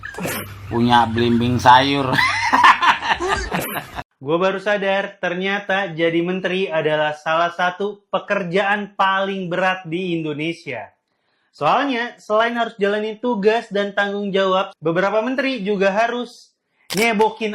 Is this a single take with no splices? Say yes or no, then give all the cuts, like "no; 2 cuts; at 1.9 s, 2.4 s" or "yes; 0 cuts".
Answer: no; 2 cuts; at 4.2 s, 14.7 s